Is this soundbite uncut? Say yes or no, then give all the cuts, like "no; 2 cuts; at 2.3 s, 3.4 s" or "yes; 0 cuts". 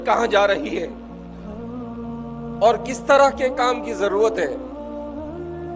no; 3 cuts; at 0.9 s, 2.3 s, 4.6 s